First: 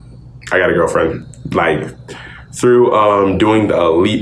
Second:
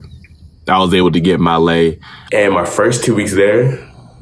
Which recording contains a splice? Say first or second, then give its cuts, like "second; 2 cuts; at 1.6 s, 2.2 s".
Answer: second; 1 cut; at 2.1 s